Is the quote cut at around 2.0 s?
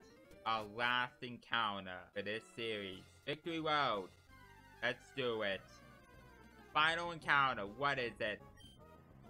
yes; 3 cuts; at 2.0 s, 3.4 s, 8.4 s

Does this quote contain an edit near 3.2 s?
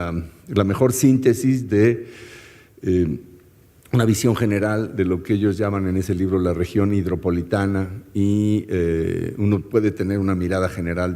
yes; 1 cut; at 3.2 s

